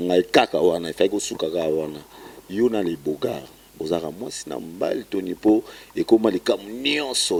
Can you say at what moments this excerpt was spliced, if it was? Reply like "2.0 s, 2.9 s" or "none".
none